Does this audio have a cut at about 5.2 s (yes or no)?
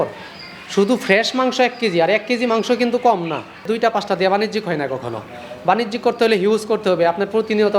no